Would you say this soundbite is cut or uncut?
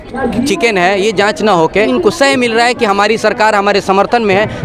cut